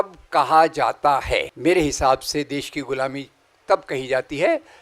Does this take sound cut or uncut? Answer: cut